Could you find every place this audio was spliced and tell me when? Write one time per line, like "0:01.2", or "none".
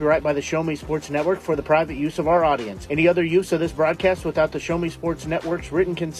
none